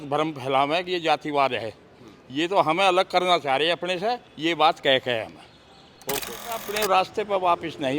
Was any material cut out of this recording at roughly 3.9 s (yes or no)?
no